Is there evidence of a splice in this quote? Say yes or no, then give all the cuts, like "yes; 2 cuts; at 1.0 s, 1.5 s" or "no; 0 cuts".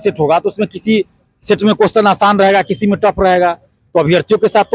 no; 0 cuts